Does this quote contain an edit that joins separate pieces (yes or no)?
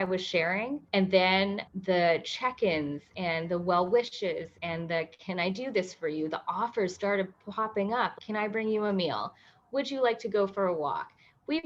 no